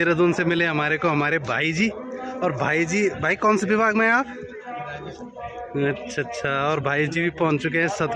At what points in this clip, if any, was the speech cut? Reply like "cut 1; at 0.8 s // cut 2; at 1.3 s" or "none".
none